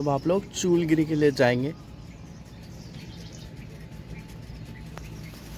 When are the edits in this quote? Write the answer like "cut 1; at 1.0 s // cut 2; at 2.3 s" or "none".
none